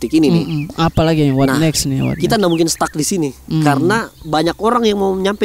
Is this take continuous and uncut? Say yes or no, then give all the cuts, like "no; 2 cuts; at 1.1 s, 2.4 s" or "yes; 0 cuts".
yes; 0 cuts